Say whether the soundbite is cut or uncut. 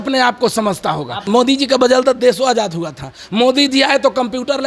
cut